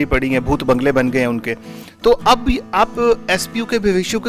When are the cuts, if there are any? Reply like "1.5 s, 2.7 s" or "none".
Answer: none

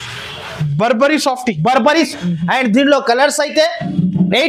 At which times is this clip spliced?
2.1 s

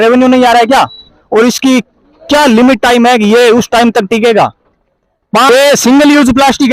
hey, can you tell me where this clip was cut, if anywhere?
5.5 s

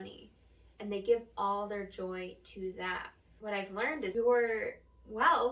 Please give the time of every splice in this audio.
4.1 s

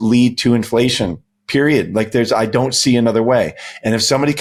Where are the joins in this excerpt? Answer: none

